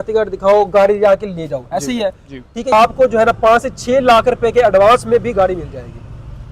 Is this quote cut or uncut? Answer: cut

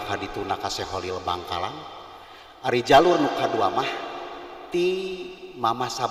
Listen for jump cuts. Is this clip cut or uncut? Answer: uncut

